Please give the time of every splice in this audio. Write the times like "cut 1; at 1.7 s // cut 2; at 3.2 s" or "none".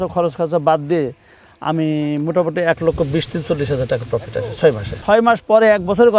cut 1; at 5.0 s